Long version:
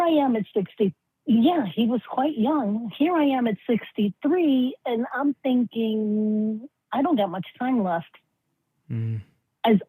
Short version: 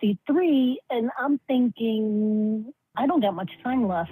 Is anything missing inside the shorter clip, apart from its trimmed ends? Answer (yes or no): no